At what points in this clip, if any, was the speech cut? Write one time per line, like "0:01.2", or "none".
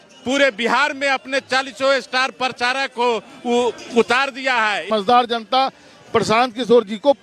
0:05.1